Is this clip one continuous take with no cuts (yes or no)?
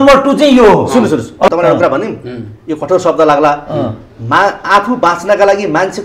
no